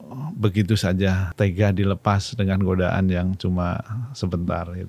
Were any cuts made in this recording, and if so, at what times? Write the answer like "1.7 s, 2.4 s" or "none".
1.3 s